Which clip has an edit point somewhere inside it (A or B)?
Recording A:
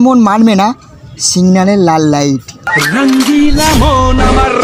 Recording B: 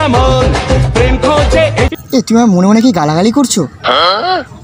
B